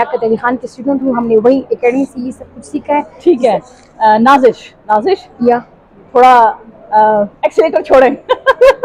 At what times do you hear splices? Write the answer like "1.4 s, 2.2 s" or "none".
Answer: none